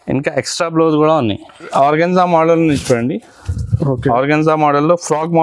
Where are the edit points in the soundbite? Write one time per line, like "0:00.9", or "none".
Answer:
0:01.6